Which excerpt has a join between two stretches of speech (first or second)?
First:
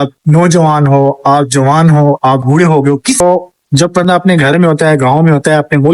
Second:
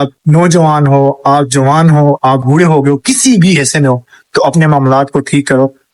first